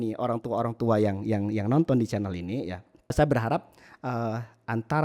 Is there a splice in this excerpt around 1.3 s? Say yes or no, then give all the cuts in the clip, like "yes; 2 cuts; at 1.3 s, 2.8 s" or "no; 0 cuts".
no; 1 cut; at 3.1 s